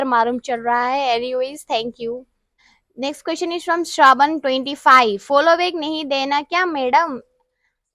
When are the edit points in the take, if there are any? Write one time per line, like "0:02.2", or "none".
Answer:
none